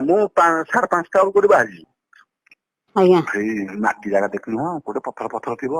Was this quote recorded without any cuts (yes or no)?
no